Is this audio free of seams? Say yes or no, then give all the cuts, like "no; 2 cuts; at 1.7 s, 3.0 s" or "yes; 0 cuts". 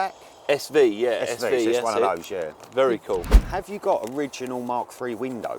no; 1 cut; at 3.4 s